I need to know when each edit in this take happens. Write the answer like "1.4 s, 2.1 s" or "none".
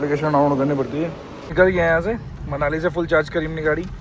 1.5 s